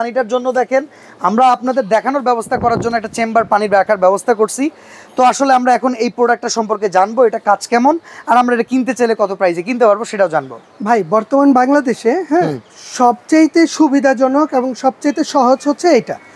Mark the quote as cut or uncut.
uncut